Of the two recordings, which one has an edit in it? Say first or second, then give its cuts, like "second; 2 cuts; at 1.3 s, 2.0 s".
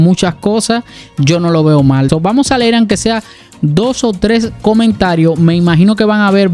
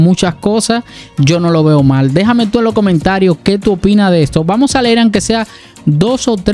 first; 1 cut; at 2.1 s